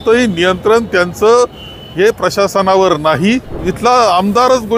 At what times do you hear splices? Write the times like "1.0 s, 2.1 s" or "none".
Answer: 3.6 s